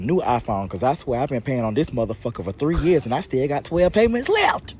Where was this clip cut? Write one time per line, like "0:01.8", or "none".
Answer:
none